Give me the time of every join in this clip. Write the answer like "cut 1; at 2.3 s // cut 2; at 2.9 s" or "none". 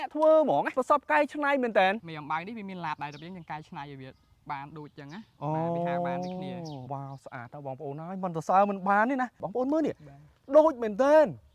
cut 1; at 2.0 s // cut 2; at 6.8 s // cut 3; at 9.4 s